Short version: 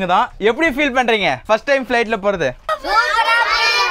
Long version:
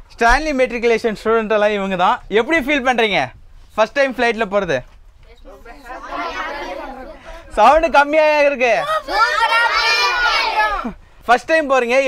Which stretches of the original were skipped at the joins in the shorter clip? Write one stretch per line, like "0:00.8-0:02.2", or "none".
0:03.3-0:03.7
0:04.9-0:08.9